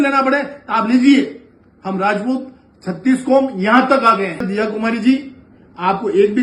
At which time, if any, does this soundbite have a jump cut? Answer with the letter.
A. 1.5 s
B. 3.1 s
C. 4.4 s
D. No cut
C